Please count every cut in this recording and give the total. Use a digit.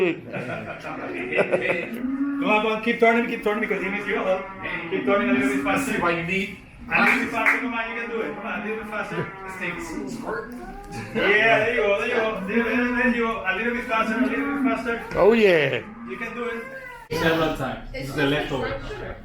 1